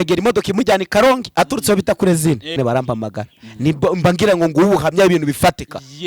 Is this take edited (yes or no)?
yes